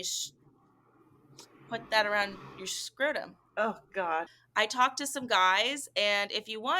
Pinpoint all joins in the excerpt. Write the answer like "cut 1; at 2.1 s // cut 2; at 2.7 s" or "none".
cut 1; at 4.4 s